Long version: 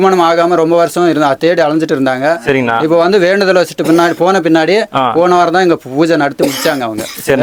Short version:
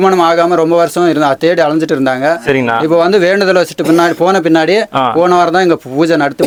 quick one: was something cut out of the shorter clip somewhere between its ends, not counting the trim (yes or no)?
no